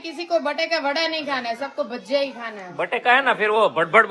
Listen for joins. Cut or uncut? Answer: uncut